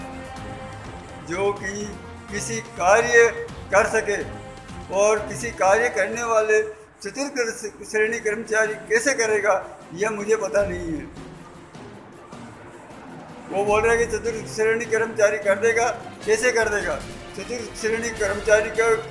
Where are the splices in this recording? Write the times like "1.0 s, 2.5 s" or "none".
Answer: 1.2 s